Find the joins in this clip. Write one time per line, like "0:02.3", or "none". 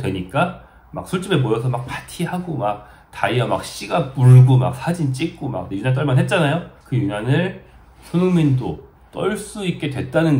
0:05.7
0:06.8